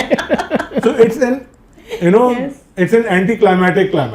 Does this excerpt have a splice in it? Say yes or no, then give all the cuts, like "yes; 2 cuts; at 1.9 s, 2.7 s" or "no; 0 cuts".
no; 0 cuts